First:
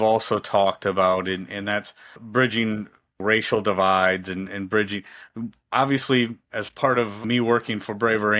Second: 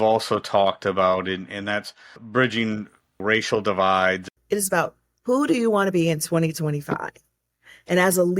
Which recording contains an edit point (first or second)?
second